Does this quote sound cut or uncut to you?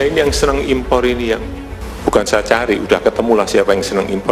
uncut